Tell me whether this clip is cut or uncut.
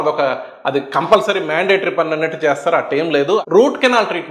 cut